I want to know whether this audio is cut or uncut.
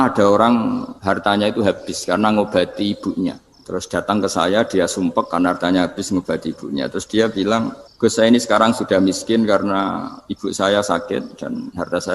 cut